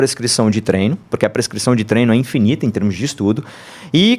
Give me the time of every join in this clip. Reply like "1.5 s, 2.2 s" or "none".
1.0 s